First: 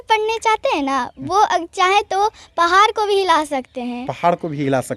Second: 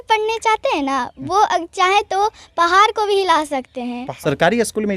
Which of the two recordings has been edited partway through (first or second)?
second